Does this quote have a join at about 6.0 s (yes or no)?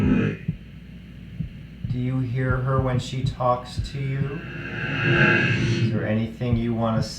yes